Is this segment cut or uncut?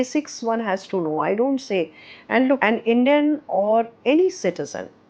cut